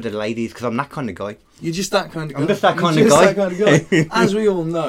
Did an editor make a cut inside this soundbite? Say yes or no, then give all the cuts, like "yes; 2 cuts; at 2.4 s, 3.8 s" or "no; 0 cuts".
no; 0 cuts